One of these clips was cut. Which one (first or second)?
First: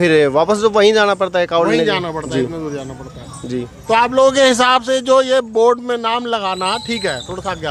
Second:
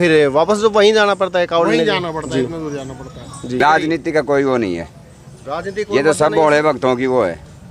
second